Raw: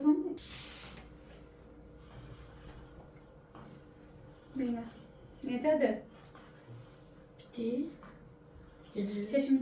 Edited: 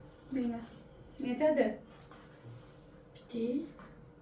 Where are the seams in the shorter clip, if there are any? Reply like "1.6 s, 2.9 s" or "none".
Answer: none